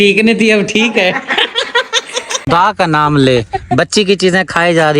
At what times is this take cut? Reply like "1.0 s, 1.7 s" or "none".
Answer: 2.5 s